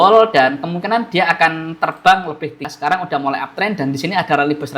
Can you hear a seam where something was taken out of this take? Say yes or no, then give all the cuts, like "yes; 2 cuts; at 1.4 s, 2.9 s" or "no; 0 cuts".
yes; 1 cut; at 2.6 s